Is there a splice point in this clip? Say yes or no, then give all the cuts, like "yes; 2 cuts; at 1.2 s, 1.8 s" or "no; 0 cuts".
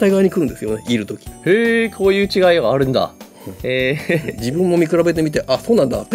no; 0 cuts